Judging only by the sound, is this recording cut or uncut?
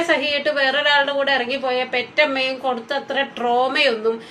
uncut